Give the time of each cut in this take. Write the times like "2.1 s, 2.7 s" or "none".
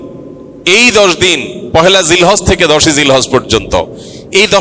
none